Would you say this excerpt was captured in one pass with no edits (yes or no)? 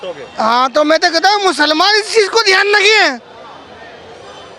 yes